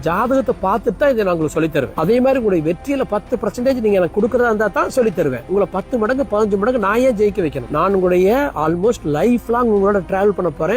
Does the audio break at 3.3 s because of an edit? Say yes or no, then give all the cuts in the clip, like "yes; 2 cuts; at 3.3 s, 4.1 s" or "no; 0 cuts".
no; 0 cuts